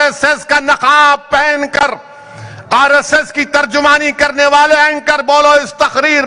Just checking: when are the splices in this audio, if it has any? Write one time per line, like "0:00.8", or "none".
none